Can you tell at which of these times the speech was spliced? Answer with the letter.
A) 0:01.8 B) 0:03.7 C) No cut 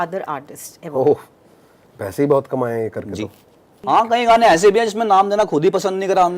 B